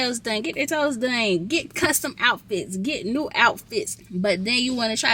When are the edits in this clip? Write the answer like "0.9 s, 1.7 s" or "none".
4.0 s